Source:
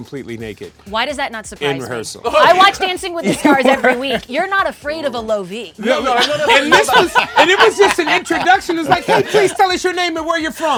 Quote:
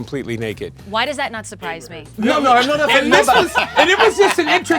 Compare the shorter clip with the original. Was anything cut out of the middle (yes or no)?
yes